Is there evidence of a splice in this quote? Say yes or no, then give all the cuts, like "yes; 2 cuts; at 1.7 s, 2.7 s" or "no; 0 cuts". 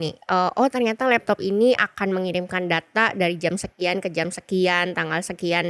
no; 0 cuts